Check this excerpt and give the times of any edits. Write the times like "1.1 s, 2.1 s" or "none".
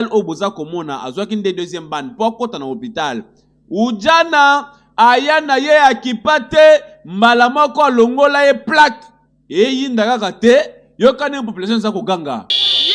none